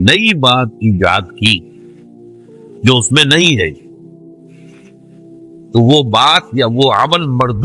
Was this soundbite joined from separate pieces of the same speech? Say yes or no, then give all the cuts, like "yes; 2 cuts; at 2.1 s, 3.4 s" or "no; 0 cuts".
yes; 2 cuts; at 4.2 s, 5.7 s